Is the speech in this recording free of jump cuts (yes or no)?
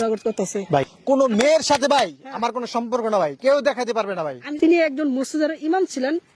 no